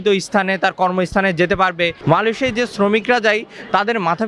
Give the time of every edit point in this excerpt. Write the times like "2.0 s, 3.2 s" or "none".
2.0 s